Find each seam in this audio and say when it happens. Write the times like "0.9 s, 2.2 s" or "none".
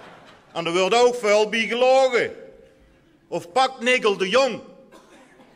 2.9 s